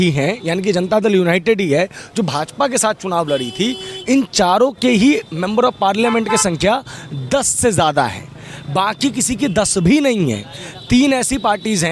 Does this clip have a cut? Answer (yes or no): no